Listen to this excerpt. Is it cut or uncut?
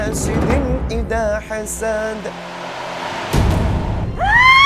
cut